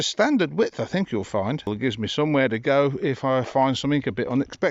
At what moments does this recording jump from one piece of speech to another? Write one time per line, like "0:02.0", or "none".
0:01.7